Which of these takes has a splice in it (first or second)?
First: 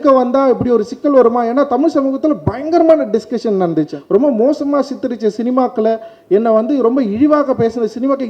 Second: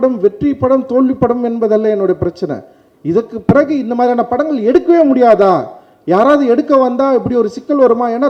first